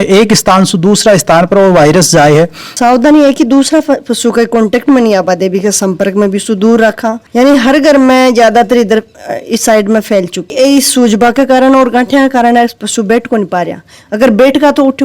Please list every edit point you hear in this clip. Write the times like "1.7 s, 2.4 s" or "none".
2.7 s, 7.1 s, 10.5 s